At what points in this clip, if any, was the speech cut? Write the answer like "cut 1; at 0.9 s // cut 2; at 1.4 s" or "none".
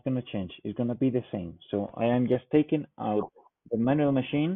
none